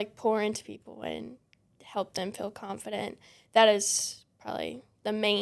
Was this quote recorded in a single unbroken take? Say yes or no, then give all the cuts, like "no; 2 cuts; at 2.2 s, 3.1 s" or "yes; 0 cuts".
yes; 0 cuts